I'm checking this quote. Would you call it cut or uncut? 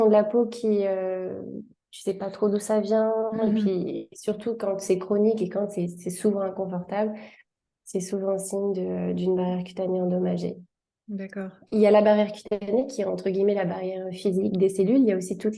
uncut